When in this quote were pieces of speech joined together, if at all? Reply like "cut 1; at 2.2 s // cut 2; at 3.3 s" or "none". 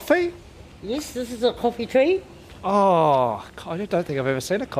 none